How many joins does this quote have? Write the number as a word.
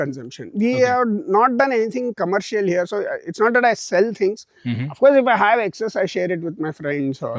zero